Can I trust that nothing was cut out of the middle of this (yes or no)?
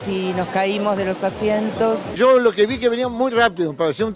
no